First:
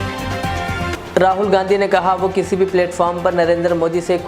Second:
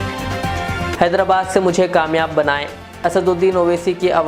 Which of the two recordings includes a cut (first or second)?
second